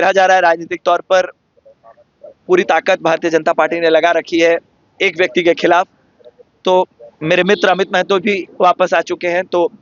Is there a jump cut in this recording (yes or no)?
no